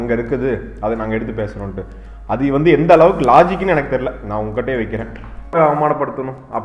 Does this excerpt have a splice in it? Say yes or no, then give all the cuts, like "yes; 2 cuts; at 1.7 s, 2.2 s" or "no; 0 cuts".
yes; 1 cut; at 5.5 s